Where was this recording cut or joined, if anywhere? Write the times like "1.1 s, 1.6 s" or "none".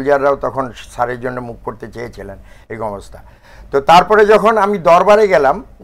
none